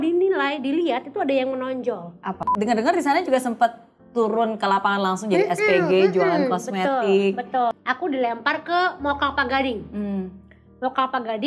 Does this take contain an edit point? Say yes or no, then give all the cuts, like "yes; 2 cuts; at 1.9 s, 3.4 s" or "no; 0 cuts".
yes; 2 cuts; at 2.5 s, 7.8 s